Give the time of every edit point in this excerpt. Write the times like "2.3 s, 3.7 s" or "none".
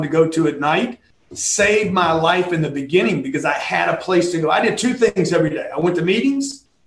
none